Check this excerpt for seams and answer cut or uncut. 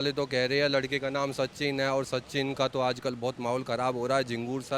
uncut